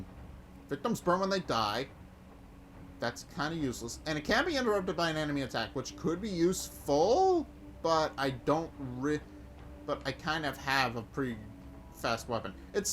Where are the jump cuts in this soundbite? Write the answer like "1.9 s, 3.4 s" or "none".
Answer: none